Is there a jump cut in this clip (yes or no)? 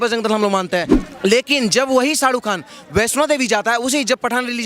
yes